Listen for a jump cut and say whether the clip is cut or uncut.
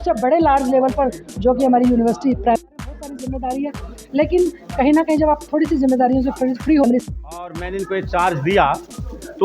cut